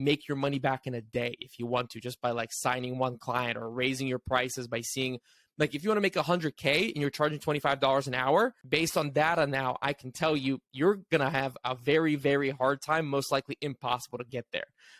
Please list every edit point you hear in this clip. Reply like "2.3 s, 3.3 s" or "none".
8.6 s